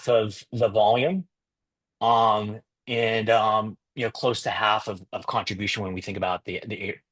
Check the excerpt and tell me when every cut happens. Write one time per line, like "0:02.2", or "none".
none